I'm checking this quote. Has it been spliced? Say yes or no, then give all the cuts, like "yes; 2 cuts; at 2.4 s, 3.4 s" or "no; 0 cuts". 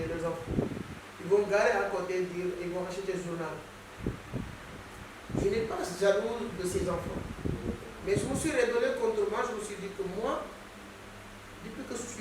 yes; 1 cut; at 3.8 s